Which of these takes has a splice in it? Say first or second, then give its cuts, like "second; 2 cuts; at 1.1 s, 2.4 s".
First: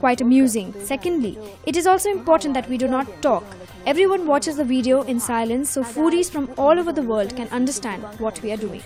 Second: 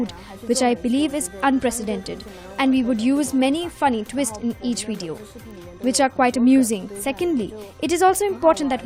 second; 1 cut; at 1.4 s